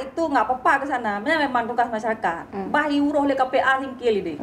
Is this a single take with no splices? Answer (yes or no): yes